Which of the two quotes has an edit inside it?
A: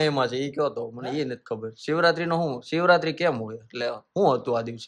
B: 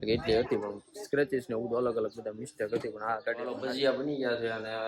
B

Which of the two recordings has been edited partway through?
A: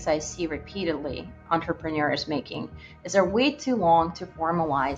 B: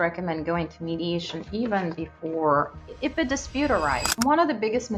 B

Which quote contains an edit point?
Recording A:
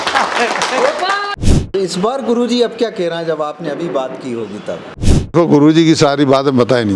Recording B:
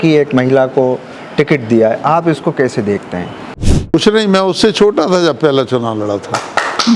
A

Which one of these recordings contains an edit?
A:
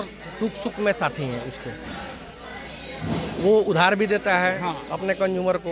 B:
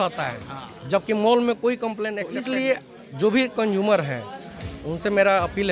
B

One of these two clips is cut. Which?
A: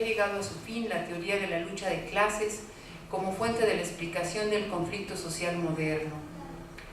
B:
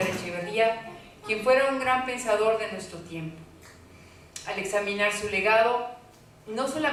A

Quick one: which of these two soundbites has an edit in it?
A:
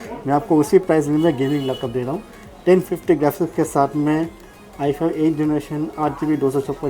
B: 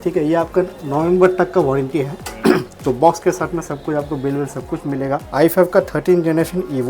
B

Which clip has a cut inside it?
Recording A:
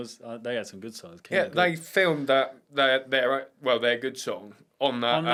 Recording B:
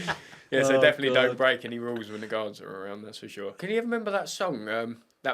B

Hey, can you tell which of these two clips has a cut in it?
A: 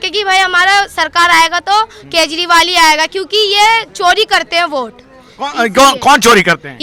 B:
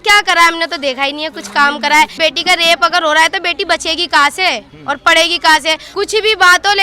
B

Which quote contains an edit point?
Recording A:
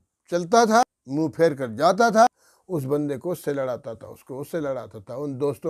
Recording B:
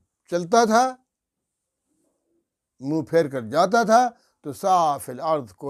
A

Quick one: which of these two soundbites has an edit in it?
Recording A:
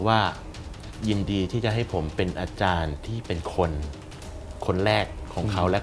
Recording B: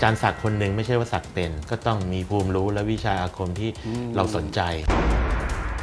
B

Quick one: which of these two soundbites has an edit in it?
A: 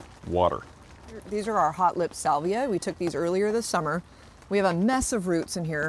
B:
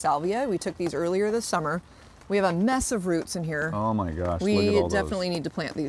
A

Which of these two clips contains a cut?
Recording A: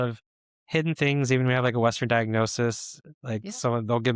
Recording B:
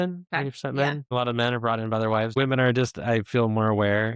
B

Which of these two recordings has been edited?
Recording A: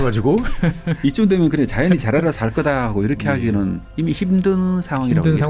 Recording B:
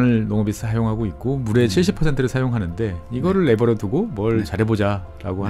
A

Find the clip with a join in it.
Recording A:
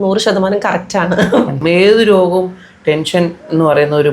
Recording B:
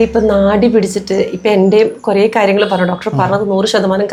A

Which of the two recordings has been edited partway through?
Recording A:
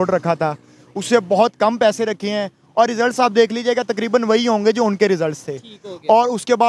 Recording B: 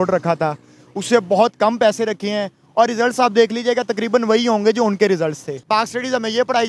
B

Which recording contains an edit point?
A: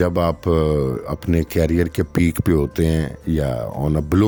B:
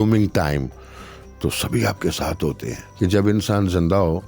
B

